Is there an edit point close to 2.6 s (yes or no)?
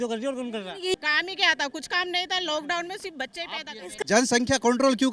no